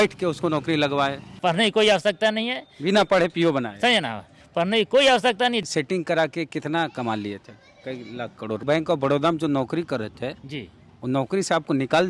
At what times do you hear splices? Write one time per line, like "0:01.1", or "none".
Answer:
0:01.4
0:05.6
0:08.6

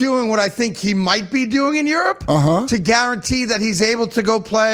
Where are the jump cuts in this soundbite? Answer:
none

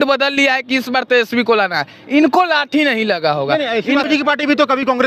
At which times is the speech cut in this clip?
0:04.1

